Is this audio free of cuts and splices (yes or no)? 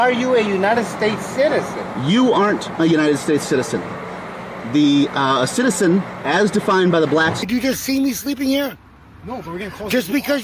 no